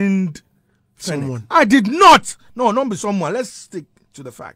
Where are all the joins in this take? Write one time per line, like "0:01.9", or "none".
none